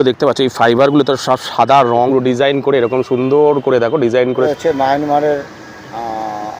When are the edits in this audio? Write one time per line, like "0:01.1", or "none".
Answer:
0:02.1
0:04.5